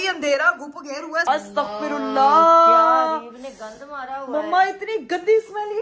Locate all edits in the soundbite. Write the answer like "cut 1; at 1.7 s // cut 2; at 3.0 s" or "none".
cut 1; at 1.2 s